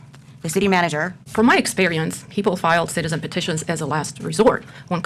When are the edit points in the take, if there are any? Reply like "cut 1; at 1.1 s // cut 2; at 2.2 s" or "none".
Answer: cut 1; at 1.2 s

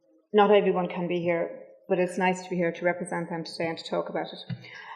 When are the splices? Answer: cut 1; at 1.4 s

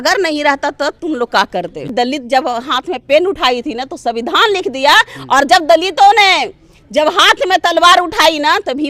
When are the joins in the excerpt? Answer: cut 1; at 1.9 s

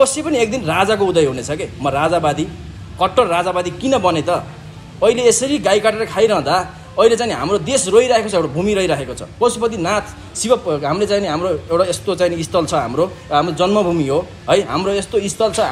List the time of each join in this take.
none

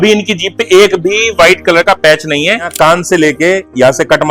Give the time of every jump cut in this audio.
cut 1; at 2.7 s

